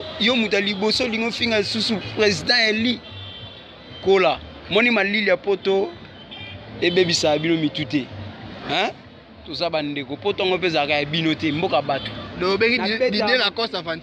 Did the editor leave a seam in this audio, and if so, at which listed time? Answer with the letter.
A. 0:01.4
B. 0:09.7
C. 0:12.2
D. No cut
C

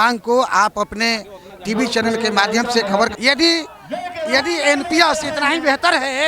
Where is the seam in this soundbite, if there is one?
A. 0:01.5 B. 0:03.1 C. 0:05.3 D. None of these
B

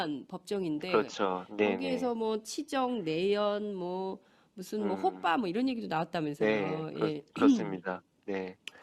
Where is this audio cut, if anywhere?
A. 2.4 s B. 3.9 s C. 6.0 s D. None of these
D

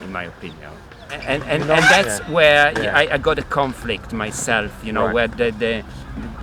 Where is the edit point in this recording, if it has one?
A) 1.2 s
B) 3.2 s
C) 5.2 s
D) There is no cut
A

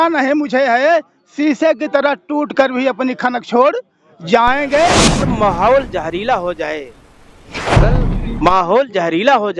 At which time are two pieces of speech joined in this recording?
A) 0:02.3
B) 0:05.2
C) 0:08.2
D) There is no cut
B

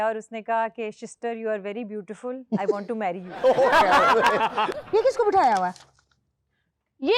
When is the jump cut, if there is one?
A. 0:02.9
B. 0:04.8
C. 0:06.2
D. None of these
B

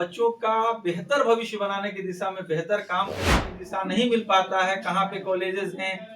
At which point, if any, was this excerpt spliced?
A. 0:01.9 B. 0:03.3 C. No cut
B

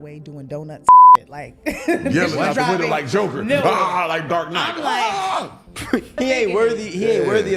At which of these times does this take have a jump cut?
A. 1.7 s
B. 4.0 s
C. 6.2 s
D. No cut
C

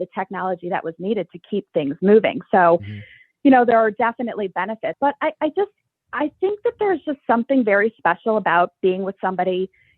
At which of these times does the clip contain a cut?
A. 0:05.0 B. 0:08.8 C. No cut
A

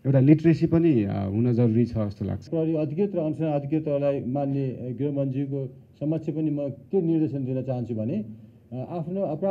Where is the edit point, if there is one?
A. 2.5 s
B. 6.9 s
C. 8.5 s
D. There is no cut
A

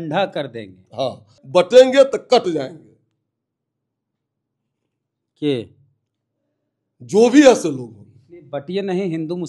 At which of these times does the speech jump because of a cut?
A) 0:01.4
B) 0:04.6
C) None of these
A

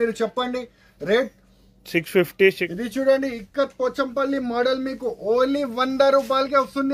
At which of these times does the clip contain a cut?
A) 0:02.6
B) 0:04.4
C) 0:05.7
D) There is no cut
A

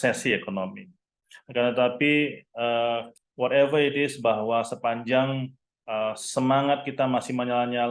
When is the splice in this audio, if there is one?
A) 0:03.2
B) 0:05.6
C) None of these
A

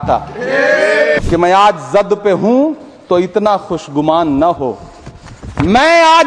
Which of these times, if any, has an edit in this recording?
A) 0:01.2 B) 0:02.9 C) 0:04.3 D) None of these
A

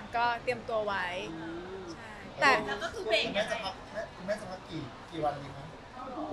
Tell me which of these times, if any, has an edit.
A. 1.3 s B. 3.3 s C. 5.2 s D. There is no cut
D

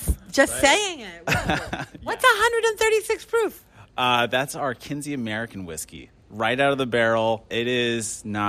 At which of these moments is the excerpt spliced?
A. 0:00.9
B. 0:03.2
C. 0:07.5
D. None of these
C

